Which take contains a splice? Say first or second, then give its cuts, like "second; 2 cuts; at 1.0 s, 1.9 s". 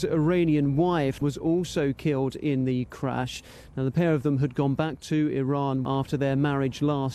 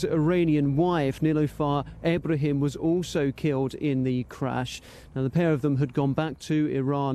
first; 2 cuts; at 1.2 s, 5.8 s